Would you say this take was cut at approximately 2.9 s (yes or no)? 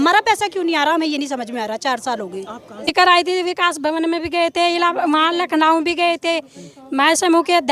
yes